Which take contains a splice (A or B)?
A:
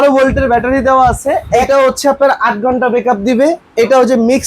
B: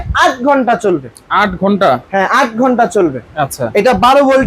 A